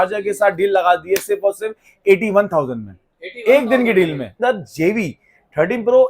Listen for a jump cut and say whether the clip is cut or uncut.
cut